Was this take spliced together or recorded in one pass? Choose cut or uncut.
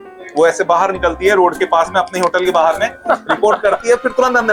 uncut